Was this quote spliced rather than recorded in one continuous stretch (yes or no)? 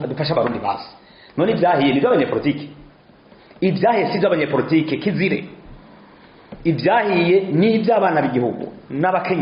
no